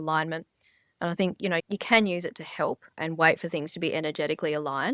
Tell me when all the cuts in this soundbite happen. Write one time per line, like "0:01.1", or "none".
0:01.6
0:03.0

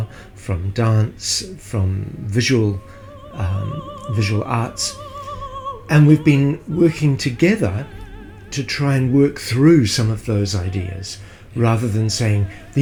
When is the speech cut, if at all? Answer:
none

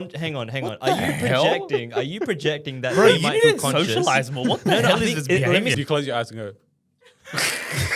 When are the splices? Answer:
0:05.7

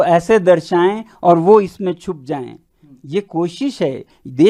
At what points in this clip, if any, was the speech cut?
none

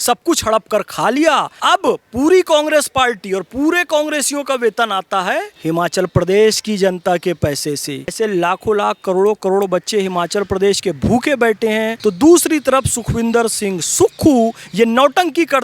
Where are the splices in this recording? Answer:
0:01.5
0:05.5
0:08.1
0:11.9

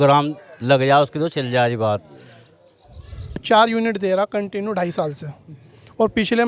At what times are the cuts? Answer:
0:03.4

